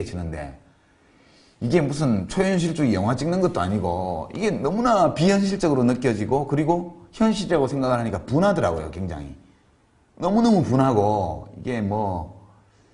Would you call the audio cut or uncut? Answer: uncut